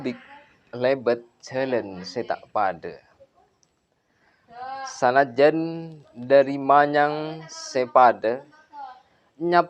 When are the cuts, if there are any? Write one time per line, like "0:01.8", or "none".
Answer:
none